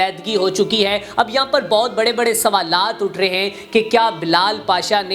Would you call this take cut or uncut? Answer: uncut